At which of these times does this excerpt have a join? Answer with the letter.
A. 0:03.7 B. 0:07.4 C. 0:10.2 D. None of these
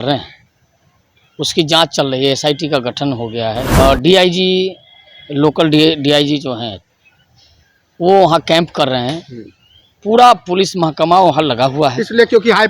A